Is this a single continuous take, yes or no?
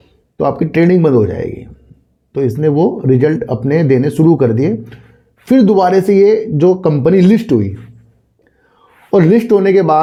yes